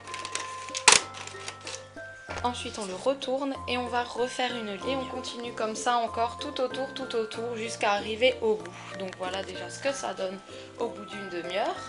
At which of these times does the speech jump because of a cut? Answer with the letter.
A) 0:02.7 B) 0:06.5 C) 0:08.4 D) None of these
A